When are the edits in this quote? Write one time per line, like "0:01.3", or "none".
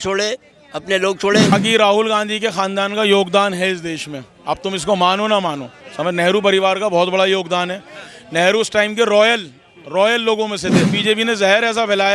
0:01.5
0:11.0

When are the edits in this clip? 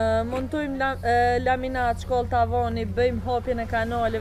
none

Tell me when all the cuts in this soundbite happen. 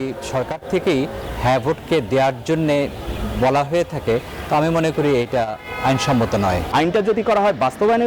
0:06.6

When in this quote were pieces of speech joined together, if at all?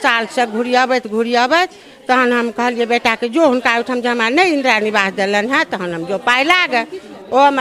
none

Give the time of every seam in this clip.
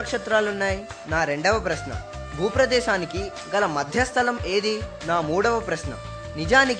0:00.9
0:04.9

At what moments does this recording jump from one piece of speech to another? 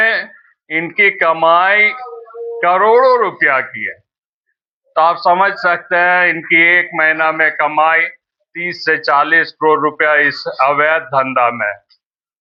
none

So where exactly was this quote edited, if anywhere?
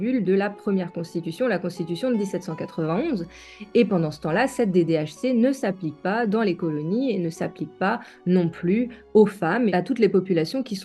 0:09.7

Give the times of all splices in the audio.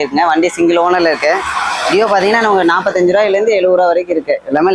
none

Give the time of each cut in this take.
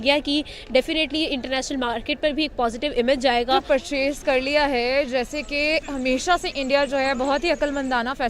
0:03.6

